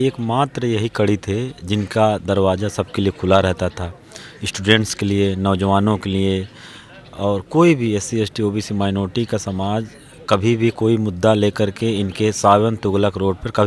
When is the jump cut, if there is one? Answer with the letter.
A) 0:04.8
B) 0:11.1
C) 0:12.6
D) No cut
D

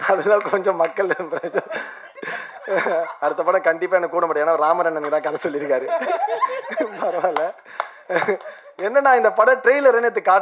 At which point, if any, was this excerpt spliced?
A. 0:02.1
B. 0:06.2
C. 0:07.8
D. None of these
A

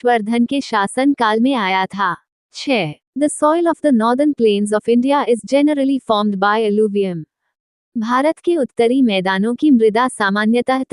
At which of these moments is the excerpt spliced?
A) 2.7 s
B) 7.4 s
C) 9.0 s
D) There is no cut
A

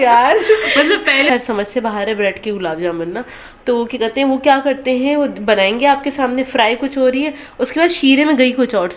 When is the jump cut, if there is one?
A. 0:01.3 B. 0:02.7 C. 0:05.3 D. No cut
A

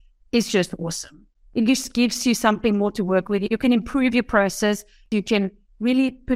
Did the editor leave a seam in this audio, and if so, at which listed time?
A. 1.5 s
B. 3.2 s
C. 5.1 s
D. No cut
C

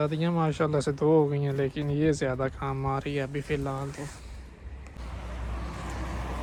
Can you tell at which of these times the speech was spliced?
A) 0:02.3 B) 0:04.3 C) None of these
C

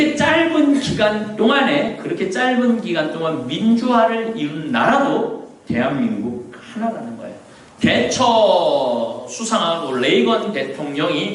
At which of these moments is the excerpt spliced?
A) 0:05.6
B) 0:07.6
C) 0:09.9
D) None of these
B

